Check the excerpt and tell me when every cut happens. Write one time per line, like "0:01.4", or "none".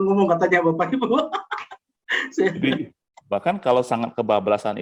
0:03.1